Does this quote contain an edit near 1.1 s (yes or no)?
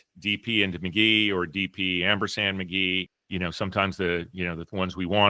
no